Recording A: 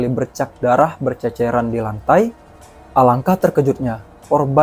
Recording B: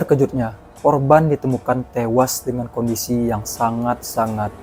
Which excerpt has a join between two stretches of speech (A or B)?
A